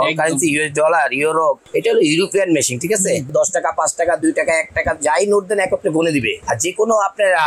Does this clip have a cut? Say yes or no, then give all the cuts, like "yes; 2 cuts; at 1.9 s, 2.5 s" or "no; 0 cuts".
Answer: yes; 3 cuts; at 1.6 s, 3.3 s, 6.4 s